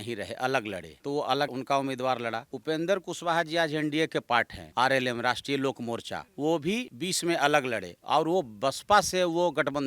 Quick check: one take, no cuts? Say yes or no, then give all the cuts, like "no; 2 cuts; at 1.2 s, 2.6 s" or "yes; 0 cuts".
yes; 0 cuts